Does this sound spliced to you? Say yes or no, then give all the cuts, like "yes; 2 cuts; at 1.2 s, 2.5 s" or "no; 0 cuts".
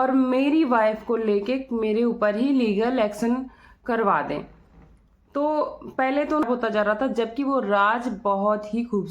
yes; 1 cut; at 6.4 s